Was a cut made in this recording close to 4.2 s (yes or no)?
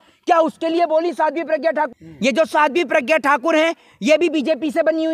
no